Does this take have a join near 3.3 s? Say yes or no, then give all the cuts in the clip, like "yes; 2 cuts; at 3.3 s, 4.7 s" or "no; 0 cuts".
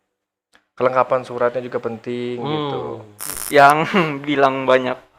yes; 1 cut; at 3.3 s